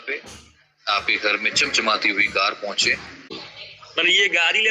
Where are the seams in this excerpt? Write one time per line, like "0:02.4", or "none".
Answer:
0:03.3